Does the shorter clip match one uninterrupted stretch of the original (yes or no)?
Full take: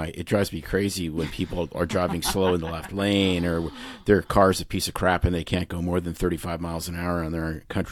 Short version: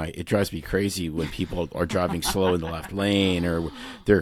yes